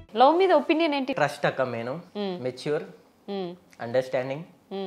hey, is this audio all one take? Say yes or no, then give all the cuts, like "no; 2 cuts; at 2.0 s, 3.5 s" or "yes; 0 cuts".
no; 1 cut; at 1.1 s